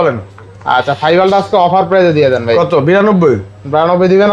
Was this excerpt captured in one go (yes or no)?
yes